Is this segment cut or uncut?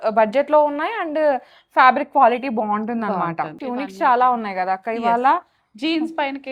cut